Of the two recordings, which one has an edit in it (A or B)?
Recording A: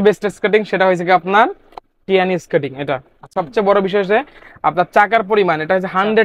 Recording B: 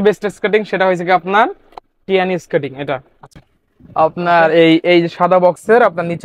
A